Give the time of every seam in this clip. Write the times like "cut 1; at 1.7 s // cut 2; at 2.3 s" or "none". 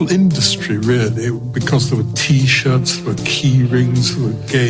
none